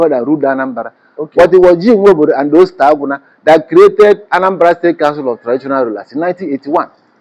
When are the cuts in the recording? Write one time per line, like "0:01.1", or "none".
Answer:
none